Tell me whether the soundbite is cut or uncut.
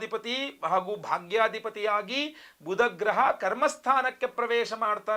uncut